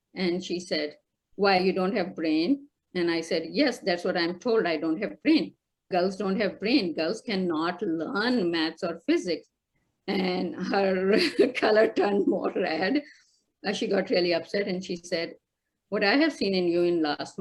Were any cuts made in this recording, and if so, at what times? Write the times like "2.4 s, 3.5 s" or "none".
none